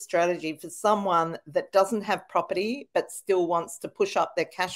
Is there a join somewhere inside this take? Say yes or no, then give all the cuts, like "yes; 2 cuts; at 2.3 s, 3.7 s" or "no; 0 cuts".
no; 0 cuts